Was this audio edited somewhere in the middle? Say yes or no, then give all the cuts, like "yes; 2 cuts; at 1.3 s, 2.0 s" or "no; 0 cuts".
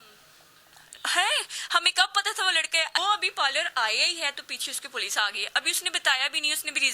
yes; 1 cut; at 3.0 s